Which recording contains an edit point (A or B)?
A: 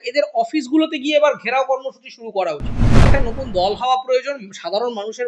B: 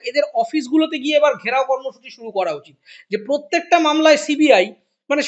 A